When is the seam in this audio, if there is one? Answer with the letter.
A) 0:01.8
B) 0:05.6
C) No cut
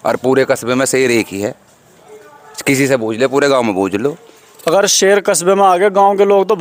C